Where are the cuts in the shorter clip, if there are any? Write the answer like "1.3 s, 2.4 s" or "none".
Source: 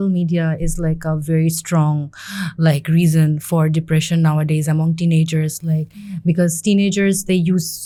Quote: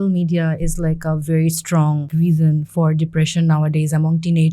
2.1 s